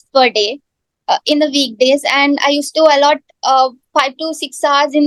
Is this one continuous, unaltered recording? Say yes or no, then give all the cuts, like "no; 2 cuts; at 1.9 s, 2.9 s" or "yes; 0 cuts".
yes; 0 cuts